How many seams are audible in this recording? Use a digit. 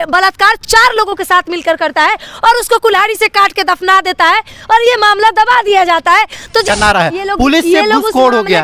1